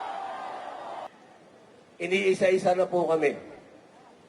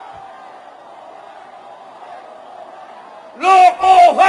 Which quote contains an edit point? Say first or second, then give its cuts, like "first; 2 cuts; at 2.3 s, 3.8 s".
first; 1 cut; at 1.1 s